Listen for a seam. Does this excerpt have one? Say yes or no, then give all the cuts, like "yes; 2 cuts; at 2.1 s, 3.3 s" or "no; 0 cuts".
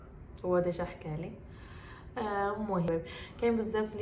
yes; 1 cut; at 2.9 s